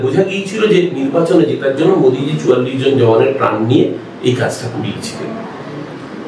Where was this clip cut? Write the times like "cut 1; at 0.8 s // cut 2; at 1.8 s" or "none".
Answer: none